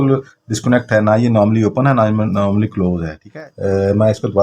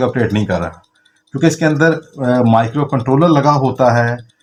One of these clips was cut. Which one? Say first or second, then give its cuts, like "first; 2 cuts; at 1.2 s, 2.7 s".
first; 1 cut; at 3.2 s